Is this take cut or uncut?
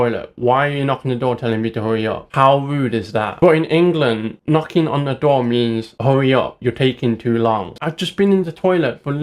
cut